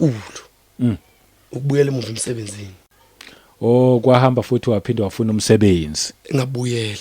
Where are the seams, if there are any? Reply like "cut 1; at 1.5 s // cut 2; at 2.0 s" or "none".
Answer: none